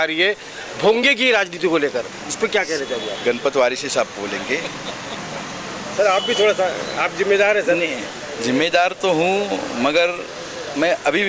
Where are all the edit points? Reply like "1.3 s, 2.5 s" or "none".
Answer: none